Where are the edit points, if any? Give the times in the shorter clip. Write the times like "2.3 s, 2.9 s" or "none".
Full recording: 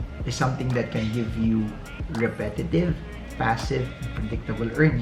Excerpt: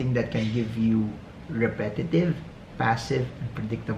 none